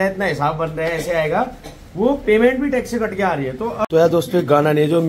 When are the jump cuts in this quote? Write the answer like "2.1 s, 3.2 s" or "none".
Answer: 3.8 s